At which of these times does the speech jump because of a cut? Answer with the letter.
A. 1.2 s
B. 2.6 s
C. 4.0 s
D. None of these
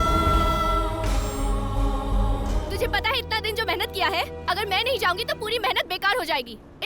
B